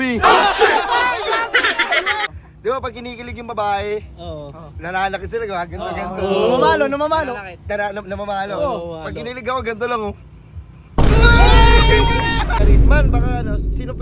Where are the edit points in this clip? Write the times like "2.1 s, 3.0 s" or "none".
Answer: 2.3 s, 12.6 s

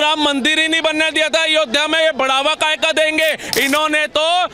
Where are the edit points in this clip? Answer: 3.4 s

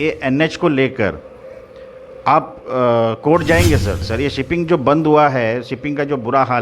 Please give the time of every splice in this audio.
4.0 s

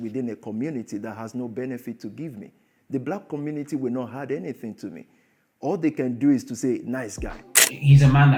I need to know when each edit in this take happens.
none

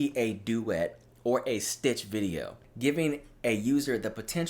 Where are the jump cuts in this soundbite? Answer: 2.6 s

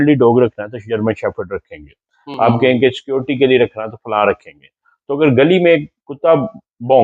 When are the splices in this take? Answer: none

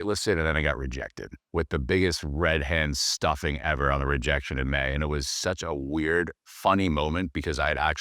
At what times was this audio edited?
1.4 s, 6.4 s

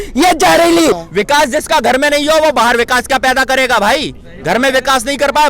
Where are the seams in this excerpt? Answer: 1.0 s

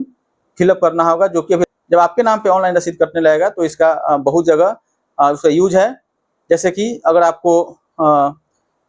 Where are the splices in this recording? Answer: 1.6 s

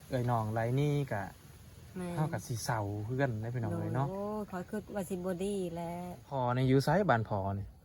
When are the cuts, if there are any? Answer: 6.4 s

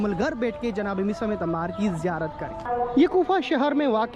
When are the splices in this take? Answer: 2.6 s

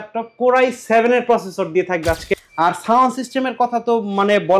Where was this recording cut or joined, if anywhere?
2.3 s

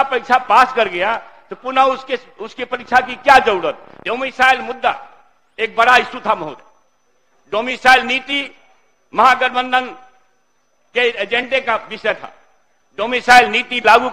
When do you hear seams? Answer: 3.9 s

